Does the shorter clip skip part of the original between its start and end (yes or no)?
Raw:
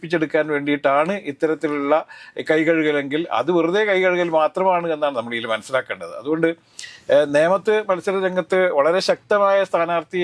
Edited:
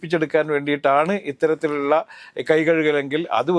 no